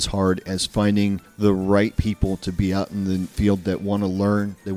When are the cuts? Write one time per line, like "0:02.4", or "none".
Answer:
0:01.3
0:03.3